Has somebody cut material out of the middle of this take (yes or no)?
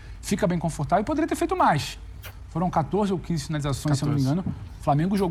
no